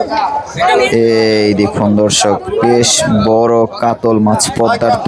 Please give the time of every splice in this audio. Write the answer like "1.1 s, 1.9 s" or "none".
none